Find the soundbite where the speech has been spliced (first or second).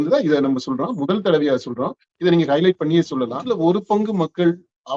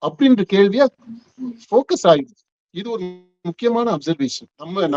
first